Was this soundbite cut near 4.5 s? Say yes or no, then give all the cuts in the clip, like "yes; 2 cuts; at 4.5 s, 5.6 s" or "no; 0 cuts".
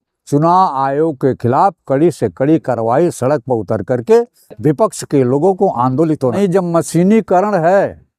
no; 1 cut; at 6.3 s